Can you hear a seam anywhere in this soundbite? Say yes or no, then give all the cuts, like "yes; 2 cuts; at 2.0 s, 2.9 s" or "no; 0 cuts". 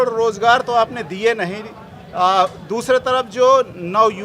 no; 0 cuts